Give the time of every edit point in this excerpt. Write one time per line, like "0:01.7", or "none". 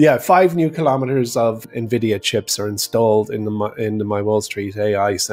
0:01.7